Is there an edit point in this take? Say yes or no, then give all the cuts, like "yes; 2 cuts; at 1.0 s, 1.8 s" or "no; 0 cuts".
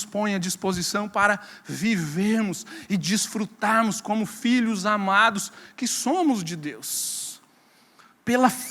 no; 0 cuts